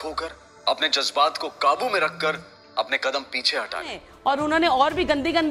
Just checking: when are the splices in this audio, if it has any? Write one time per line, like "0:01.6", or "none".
0:04.1

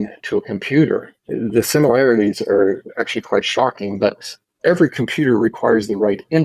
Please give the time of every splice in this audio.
0:01.2

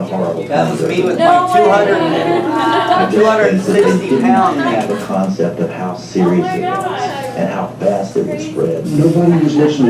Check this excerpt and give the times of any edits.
none

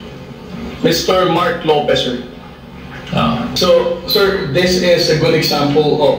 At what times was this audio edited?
0:03.5

